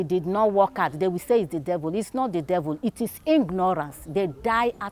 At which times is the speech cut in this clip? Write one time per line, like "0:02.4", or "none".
none